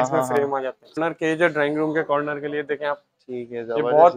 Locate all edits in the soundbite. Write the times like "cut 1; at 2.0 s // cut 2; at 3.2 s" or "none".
cut 1; at 1.0 s

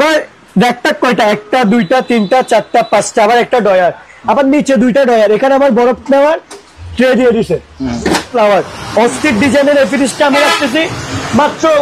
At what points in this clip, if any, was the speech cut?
cut 1; at 8.3 s

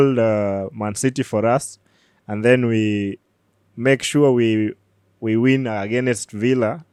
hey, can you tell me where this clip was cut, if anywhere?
none

